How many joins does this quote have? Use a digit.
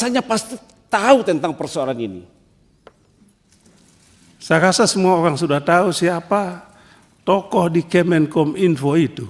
1